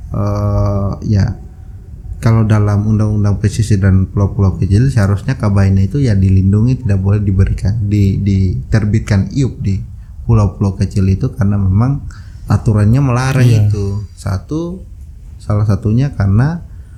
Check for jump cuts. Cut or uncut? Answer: uncut